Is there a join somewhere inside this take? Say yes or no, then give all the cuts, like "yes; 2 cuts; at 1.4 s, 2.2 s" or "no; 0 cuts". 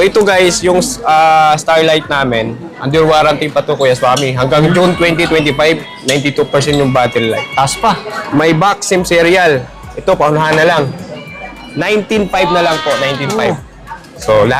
no; 0 cuts